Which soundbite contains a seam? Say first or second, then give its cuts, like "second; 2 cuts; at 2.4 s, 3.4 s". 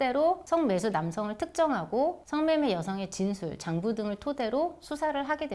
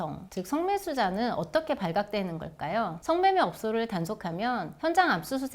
second; 1 cut; at 3.0 s